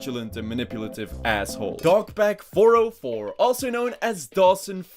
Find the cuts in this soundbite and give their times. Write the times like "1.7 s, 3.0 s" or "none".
1.9 s

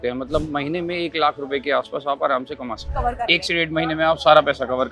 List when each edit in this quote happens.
2.9 s

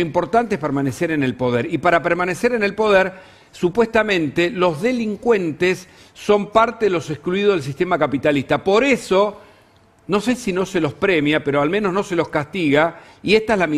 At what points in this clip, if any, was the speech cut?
none

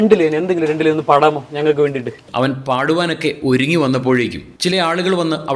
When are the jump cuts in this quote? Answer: 2.2 s

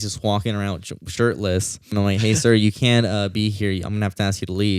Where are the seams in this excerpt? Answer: 1.9 s

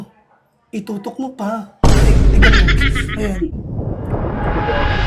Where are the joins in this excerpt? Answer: 3.6 s

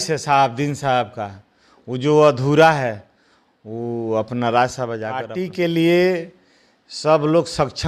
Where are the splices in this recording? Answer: 5.3 s

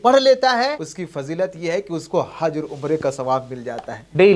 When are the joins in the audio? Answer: 0.9 s

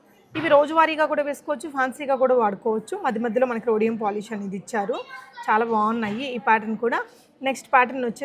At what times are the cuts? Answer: none

